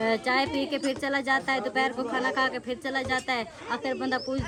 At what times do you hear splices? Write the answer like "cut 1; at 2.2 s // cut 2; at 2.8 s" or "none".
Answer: none

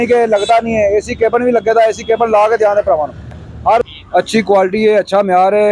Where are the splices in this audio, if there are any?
cut 1; at 3.9 s

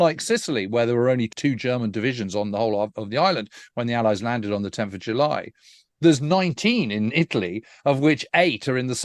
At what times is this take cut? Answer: cut 1; at 1.3 s

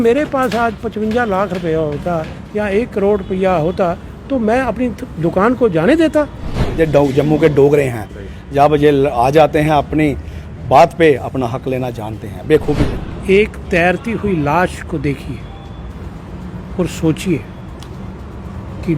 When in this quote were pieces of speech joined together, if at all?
cut 1; at 6.6 s // cut 2; at 12.9 s

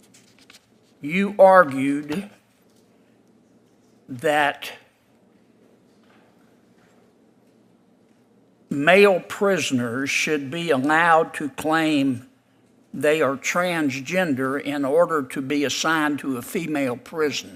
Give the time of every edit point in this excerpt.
none

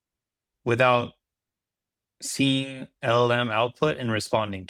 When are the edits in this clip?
none

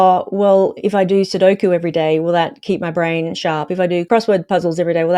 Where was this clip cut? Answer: cut 1; at 4.1 s

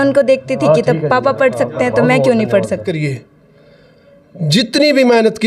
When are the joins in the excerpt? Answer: cut 1; at 2.9 s

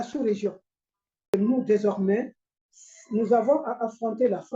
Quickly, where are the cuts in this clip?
cut 1; at 1.3 s

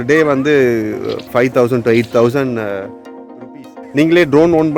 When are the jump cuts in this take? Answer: cut 1; at 1.2 s // cut 2; at 3.6 s

